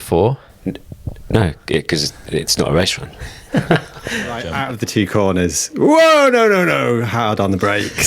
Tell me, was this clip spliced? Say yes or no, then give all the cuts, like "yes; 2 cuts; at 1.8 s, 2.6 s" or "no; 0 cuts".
yes; 1 cut; at 4.5 s